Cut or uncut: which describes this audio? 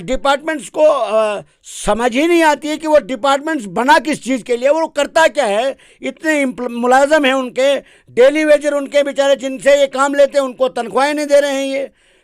uncut